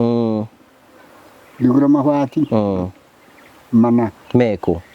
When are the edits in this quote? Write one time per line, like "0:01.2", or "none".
none